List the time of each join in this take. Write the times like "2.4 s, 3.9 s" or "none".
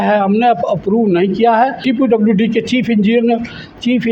1.8 s